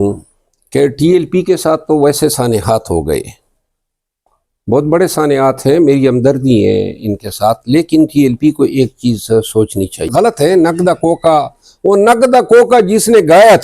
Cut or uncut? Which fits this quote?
cut